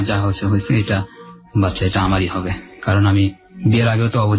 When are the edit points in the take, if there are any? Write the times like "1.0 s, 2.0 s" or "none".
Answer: none